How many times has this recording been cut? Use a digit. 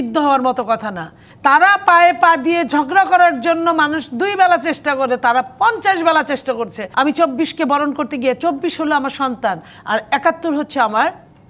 2